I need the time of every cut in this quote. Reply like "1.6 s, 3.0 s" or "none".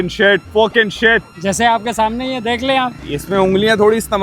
1.3 s